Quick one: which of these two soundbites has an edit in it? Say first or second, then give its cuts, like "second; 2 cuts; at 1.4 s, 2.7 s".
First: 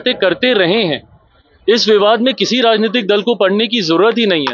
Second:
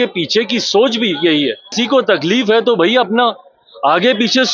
second; 1 cut; at 1.8 s